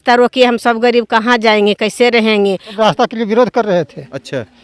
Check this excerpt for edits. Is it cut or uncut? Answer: cut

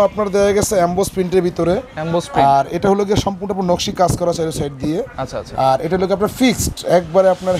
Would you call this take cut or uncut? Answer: uncut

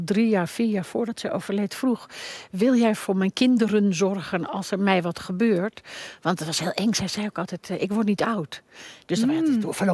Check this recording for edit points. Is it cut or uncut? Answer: uncut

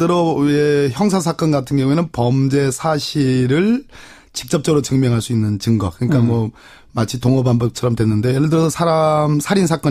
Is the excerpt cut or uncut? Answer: cut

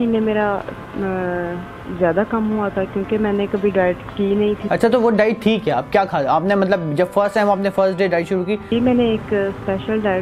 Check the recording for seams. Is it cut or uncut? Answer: cut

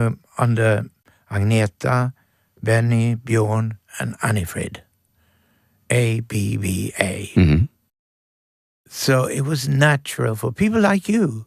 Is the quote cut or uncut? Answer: uncut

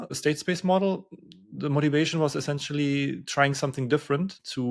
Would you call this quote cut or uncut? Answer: uncut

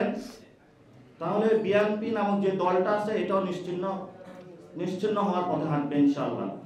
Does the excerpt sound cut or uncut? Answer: uncut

